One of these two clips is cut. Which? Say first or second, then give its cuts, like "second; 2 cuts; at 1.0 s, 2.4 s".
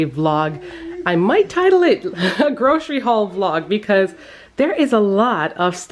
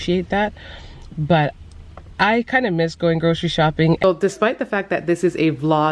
second; 1 cut; at 4.0 s